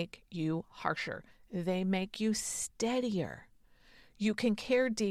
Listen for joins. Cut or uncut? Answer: uncut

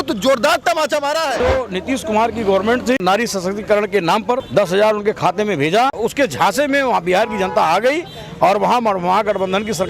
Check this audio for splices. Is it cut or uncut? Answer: cut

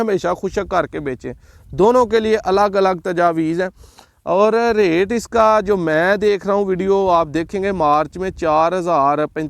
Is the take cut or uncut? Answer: uncut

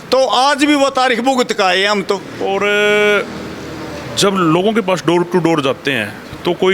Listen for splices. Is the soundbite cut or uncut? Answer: cut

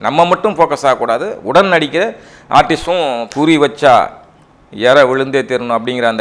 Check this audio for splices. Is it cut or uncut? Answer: cut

